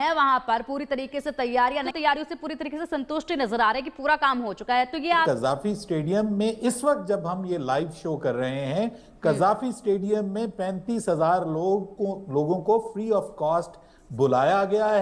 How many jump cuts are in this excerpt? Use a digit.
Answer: 2